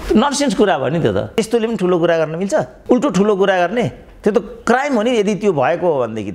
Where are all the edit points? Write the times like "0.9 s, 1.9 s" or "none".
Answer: 1.3 s, 2.7 s